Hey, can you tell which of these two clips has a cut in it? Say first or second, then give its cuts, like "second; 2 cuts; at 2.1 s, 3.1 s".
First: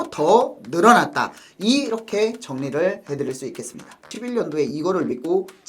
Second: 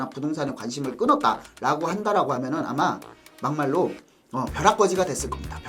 first; 1 cut; at 4.1 s